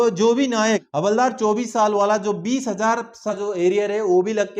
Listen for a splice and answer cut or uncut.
cut